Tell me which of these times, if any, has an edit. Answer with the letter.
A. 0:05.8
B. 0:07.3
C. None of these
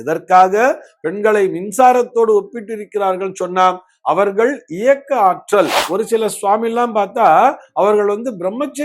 A